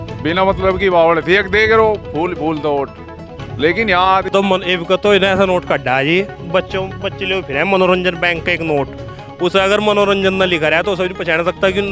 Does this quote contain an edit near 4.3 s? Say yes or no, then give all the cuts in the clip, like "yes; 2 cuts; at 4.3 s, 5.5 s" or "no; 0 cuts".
yes; 1 cut; at 4.3 s